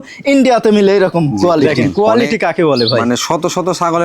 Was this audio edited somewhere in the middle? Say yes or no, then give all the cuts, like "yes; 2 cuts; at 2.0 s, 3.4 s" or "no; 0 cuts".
yes; 1 cut; at 1.7 s